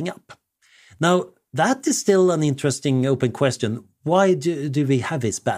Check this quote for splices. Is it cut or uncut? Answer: uncut